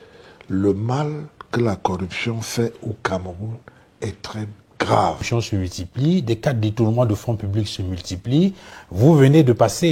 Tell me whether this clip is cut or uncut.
cut